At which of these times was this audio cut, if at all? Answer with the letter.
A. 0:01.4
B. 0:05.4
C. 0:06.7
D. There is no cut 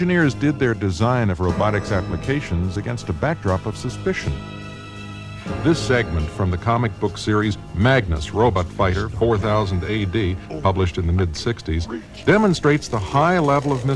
A